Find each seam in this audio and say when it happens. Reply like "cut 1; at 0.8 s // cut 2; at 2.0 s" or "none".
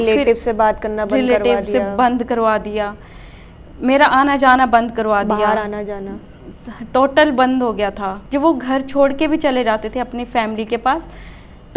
cut 1; at 8.1 s